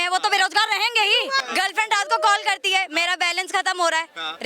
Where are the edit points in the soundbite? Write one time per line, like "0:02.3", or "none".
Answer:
0:01.4